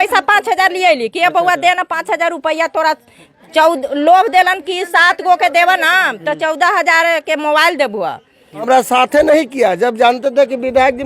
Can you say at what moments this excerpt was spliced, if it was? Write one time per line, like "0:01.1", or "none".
0:08.7